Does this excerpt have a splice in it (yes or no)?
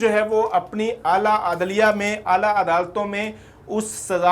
no